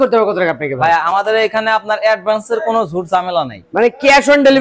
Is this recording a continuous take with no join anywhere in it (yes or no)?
yes